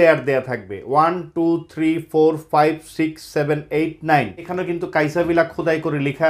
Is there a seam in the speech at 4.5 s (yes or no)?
yes